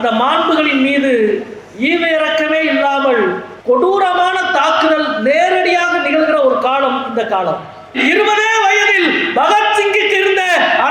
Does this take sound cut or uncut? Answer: cut